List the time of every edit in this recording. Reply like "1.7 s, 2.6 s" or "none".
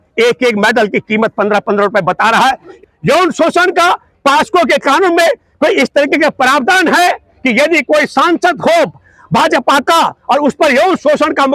2.7 s